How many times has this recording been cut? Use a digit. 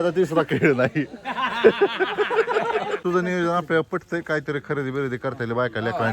1